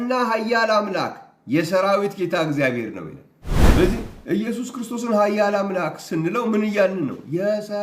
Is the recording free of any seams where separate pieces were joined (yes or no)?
no